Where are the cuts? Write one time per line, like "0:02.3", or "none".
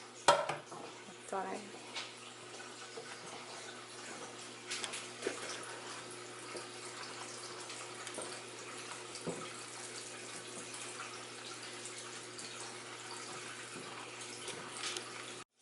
none